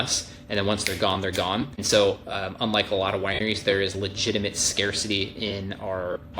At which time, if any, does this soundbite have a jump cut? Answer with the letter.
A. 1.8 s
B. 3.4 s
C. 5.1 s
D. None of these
A